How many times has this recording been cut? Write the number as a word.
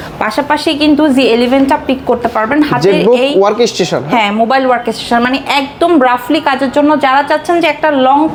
zero